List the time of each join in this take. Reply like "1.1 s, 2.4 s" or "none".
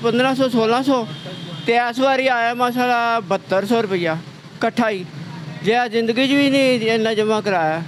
none